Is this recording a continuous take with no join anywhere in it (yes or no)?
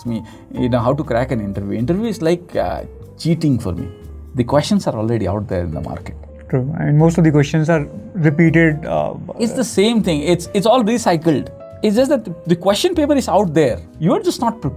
yes